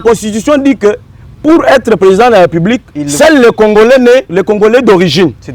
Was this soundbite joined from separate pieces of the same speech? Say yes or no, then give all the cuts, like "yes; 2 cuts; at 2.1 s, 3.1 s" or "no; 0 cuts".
yes; 1 cut; at 4.3 s